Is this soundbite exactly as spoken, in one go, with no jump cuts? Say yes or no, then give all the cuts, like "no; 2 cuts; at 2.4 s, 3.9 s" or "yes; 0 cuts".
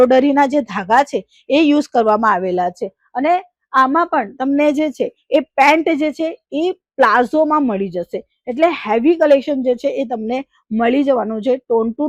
yes; 0 cuts